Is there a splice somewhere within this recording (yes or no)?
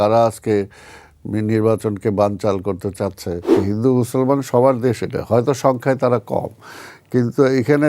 yes